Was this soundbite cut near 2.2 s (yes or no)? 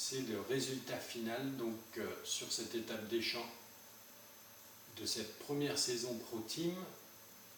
no